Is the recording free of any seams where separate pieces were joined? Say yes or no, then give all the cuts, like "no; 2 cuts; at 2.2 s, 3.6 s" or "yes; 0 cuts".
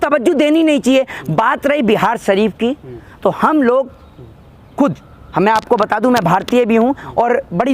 yes; 0 cuts